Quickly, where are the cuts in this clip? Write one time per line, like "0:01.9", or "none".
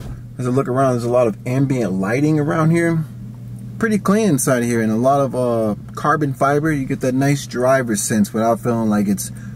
none